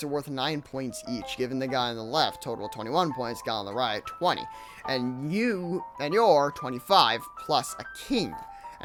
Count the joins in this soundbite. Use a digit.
0